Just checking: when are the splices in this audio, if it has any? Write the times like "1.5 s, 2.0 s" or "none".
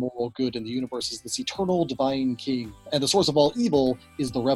2.8 s